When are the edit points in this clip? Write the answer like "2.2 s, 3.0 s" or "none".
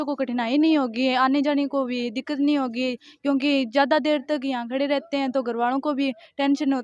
none